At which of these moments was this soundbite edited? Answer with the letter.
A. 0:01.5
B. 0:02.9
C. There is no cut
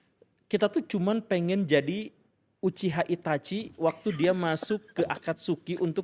A